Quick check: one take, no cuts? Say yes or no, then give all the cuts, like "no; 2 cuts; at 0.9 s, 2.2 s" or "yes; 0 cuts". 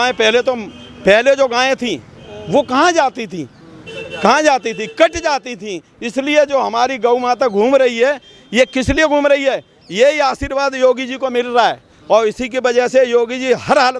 yes; 0 cuts